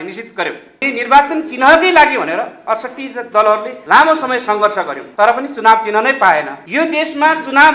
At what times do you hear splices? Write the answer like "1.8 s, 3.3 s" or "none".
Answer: 0.9 s, 3.7 s, 5.0 s, 6.6 s

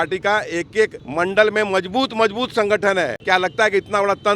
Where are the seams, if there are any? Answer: 1.0 s, 3.2 s

